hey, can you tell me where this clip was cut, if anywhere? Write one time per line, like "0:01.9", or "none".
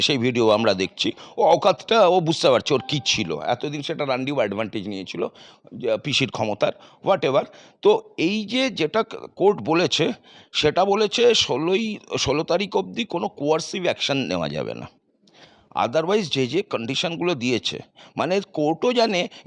none